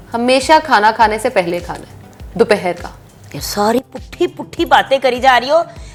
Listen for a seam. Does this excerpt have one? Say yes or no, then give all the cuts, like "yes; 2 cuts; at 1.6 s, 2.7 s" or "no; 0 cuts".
no; 0 cuts